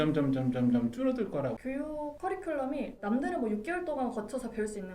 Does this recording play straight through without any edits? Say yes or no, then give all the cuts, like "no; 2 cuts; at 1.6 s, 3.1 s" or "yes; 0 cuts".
no; 1 cut; at 1.6 s